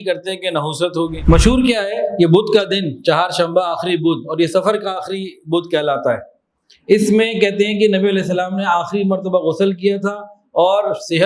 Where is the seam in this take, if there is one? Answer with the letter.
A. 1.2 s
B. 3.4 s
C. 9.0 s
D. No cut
A